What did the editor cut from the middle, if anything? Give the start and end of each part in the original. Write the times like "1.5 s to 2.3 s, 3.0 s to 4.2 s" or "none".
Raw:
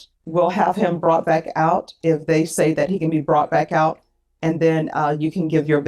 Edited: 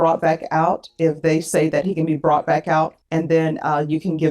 4.0 s to 4.3 s

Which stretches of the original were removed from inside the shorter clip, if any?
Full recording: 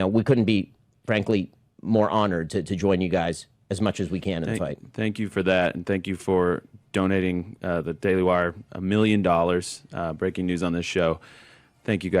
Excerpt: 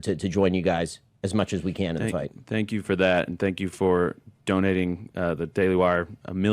none

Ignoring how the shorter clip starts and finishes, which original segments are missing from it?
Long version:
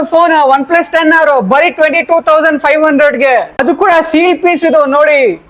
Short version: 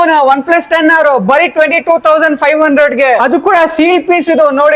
3.5 s to 3.6 s

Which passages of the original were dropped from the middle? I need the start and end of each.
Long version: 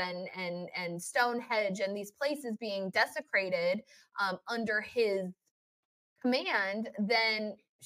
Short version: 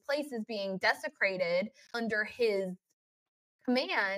4.0 s to 4.4 s

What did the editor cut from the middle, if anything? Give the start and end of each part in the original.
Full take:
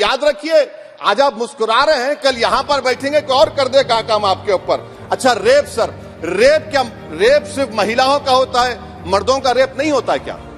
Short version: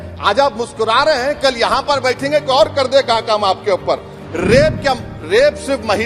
5.0 s to 6.0 s

